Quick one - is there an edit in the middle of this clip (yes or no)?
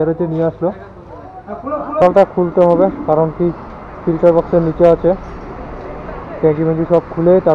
yes